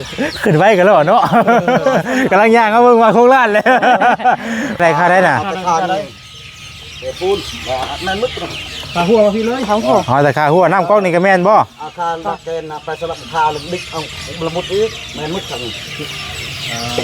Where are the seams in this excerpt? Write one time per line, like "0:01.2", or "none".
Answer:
0:04.8

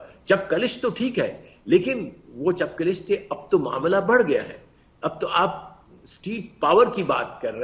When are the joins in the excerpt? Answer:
none

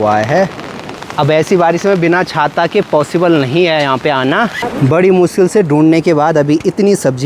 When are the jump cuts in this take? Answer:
0:00.9
0:04.6

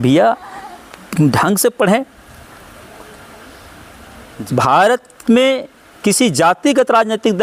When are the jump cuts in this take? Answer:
none

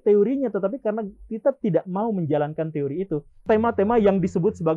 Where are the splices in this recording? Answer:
0:03.4

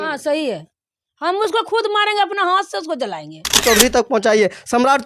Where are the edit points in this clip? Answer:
0:03.6

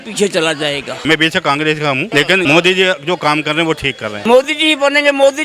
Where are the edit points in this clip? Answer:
0:01.0
0:02.3
0:04.0

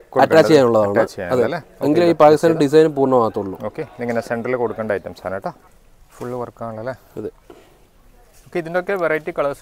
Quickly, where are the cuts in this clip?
0:05.6

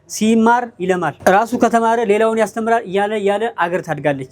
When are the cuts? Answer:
0:01.1

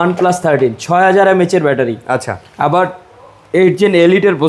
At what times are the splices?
none

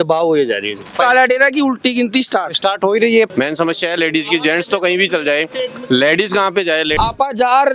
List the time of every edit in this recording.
0:00.9
0:03.3
0:07.0

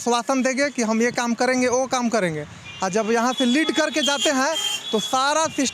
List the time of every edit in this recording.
none

